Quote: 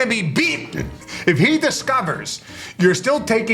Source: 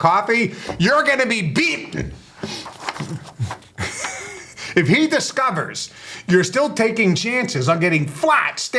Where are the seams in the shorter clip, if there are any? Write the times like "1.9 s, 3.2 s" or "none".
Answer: 1.0 s